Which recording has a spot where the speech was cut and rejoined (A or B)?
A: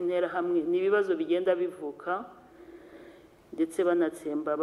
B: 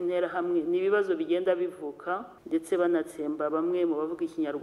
B